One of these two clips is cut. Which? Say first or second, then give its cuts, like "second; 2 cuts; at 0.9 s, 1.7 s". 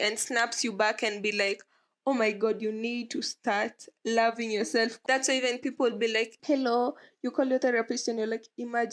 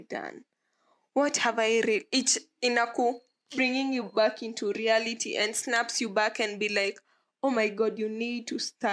first; 2 cuts; at 5.0 s, 6.4 s